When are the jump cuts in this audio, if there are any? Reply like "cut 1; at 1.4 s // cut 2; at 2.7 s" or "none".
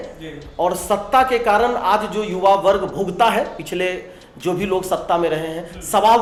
none